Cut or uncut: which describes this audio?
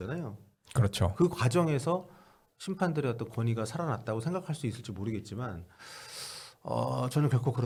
uncut